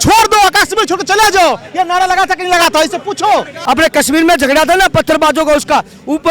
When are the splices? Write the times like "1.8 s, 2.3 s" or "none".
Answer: 3.5 s

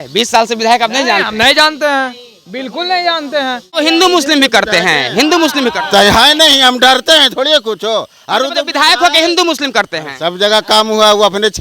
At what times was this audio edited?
3.7 s

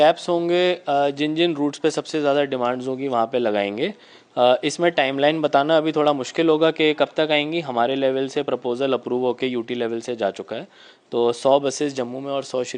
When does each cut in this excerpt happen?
none

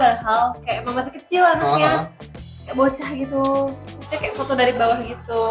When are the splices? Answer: none

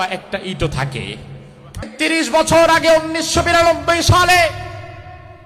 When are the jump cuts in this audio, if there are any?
1.9 s

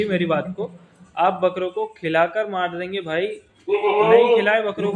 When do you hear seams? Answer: none

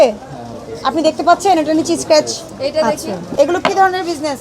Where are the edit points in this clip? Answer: 3.2 s

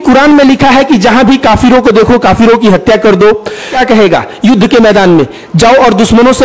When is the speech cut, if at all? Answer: 3.8 s

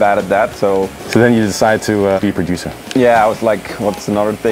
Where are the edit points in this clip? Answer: 1.0 s, 2.2 s

